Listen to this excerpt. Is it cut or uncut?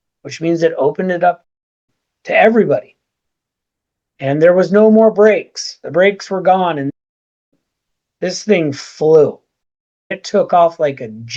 uncut